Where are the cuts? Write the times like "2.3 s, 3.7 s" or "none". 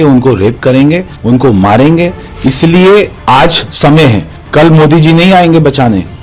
1.1 s, 2.2 s, 4.3 s